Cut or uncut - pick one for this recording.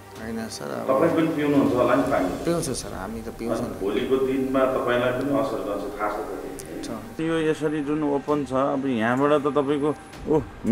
cut